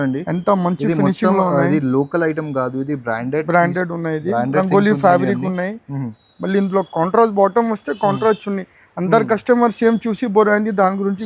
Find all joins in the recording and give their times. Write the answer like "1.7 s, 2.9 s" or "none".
none